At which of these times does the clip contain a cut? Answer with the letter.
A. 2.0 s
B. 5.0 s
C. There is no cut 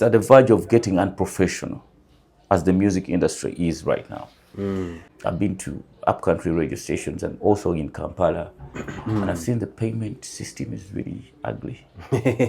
B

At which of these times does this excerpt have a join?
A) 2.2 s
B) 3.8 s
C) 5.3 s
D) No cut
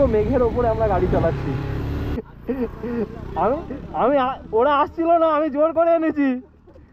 A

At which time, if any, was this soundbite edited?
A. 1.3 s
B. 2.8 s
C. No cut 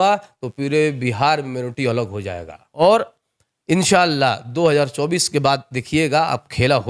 B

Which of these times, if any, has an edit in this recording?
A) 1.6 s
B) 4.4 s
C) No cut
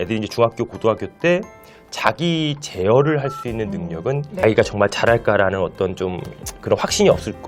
B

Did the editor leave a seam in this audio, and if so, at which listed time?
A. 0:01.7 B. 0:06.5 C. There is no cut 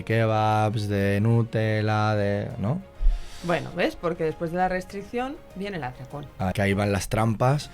B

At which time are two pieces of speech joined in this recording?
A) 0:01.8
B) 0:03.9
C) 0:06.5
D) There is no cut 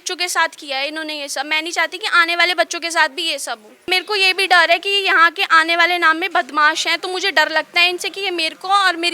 B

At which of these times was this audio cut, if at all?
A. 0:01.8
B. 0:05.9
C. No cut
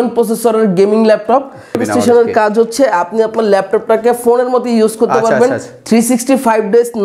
A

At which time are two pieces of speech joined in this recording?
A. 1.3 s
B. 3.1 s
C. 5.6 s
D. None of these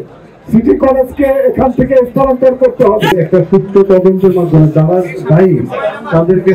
B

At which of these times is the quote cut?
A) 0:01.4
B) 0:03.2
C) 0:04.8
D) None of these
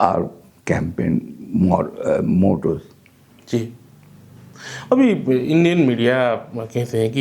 D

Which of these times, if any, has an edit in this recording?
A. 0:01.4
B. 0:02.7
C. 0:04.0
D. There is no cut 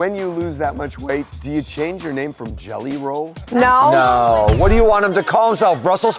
A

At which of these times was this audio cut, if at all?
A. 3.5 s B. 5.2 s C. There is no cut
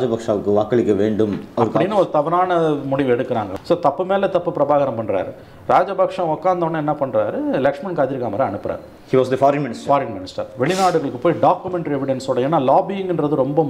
A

